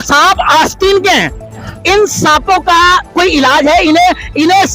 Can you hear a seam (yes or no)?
yes